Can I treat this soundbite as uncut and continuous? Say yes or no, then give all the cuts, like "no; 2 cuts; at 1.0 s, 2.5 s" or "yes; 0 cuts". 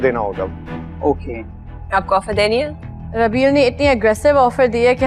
yes; 0 cuts